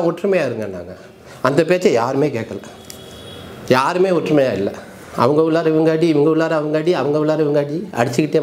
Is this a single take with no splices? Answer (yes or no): yes